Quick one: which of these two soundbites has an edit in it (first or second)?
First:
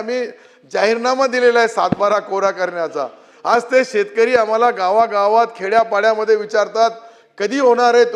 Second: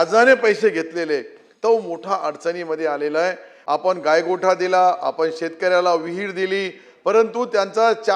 second